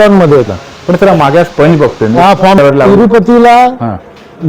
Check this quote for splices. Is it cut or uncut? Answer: cut